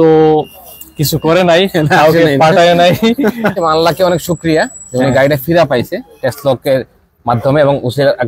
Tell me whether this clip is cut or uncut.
cut